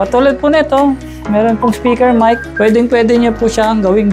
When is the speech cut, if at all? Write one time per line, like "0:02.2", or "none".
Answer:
0:02.5